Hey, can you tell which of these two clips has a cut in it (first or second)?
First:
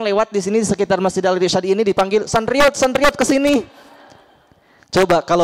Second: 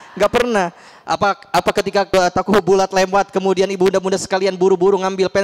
second